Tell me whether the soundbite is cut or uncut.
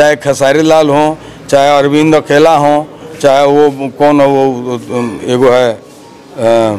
uncut